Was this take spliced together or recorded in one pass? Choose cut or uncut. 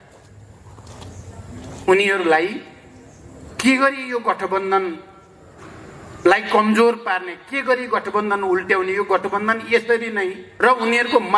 cut